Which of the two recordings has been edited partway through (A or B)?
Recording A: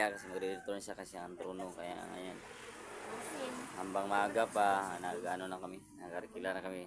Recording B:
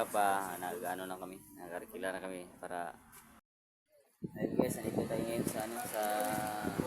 B